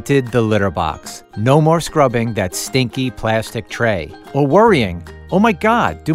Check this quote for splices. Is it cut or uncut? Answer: uncut